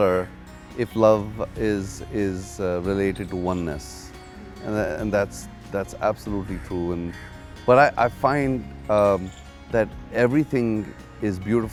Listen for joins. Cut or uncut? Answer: uncut